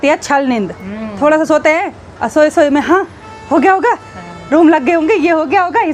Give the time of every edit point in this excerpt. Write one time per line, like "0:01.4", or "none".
none